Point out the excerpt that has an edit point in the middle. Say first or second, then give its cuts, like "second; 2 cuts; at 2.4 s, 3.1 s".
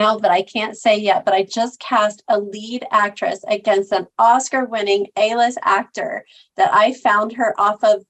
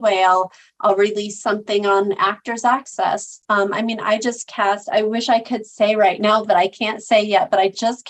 second; 1 cut; at 3.3 s